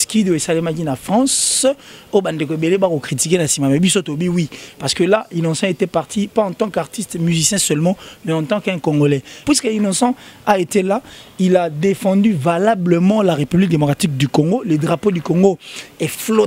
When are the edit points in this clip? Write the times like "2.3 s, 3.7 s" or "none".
9.4 s